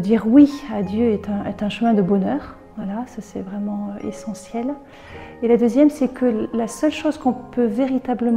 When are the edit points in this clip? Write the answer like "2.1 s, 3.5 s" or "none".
none

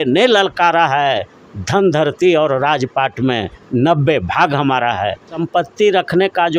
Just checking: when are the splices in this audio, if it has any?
5.3 s

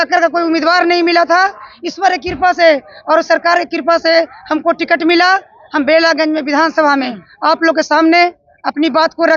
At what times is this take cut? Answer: none

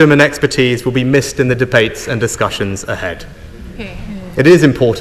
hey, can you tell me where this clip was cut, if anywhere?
none

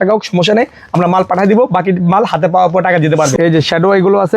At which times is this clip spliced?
3.3 s

